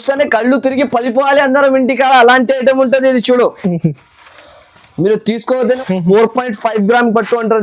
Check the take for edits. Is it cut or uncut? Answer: cut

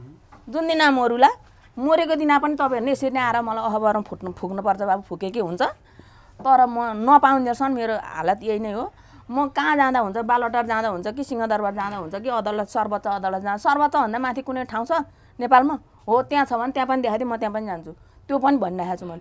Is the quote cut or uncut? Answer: uncut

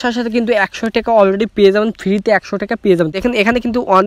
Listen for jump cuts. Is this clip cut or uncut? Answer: cut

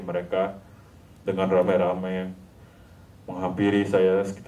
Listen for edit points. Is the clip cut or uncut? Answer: uncut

